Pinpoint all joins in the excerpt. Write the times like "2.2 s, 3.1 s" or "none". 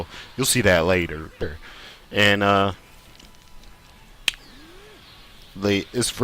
none